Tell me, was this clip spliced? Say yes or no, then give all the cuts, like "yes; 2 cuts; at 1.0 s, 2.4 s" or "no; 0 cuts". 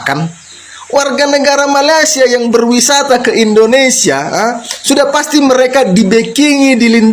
no; 0 cuts